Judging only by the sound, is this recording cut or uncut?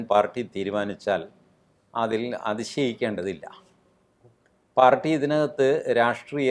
uncut